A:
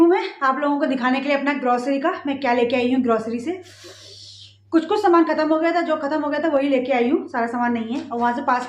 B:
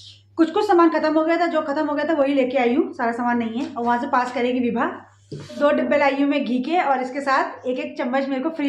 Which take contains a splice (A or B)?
B